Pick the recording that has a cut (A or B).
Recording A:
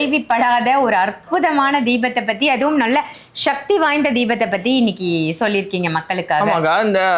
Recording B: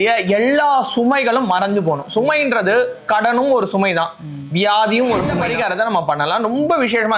B